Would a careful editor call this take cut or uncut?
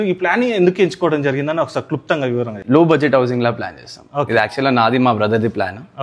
cut